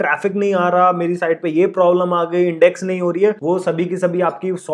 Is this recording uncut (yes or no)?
yes